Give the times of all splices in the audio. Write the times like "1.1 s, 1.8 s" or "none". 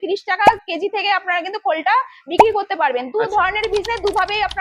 none